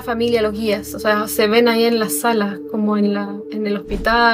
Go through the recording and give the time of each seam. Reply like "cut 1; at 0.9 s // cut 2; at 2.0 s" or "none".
none